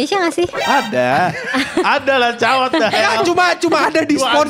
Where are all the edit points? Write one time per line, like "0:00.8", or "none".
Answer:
none